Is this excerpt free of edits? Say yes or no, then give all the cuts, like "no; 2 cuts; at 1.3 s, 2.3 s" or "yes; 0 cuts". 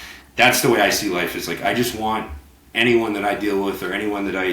yes; 0 cuts